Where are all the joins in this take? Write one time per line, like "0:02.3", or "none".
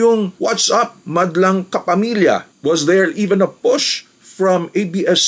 0:02.5